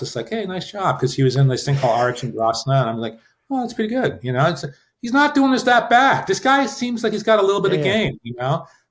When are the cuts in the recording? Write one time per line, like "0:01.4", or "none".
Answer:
none